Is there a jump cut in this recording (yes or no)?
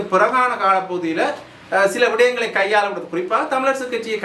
no